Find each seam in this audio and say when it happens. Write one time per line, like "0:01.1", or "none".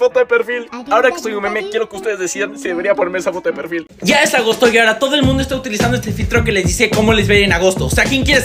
0:03.9